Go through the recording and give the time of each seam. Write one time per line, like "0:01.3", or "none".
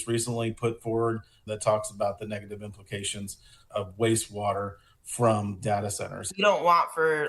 0:01.4
0:03.6
0:06.3